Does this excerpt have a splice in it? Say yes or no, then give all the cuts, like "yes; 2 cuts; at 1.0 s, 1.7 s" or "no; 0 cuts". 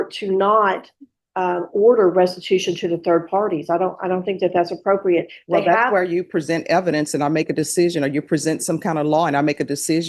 no; 0 cuts